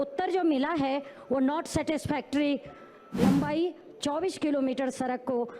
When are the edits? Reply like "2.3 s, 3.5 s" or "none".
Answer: 3.2 s

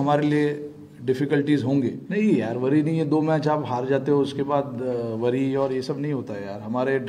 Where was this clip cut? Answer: 2.0 s

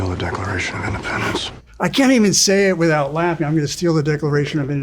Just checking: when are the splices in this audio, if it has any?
1.6 s

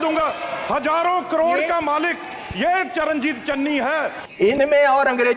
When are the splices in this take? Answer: 4.2 s

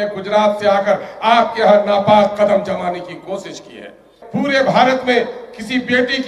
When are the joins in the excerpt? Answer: 4.2 s

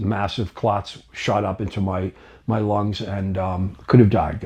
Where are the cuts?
none

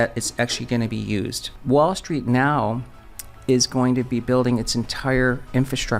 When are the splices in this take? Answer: 1.4 s

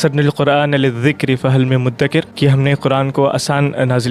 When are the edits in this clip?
2.3 s

